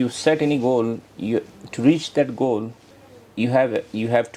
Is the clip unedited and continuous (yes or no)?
yes